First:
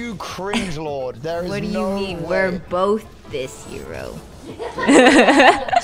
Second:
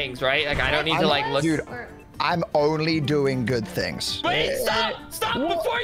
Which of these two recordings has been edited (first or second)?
second